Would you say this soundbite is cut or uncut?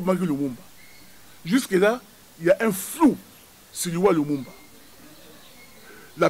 uncut